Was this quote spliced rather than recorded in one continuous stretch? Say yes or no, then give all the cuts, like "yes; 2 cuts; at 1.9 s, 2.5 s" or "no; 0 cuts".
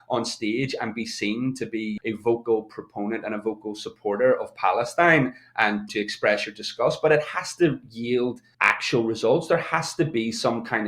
yes; 3 cuts; at 1.9 s, 5.9 s, 8.5 s